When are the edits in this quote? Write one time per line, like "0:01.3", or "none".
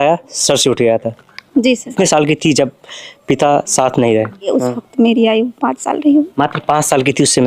0:01.9
0:04.5